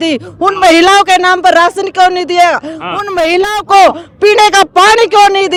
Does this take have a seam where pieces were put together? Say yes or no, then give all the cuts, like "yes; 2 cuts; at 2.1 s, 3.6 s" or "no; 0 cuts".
no; 0 cuts